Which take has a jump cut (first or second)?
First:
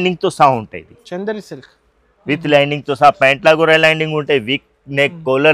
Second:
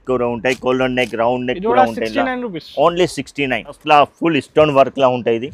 second